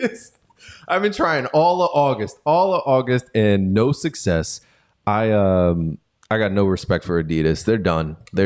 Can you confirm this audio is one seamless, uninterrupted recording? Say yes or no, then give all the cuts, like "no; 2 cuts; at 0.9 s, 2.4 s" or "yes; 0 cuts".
yes; 0 cuts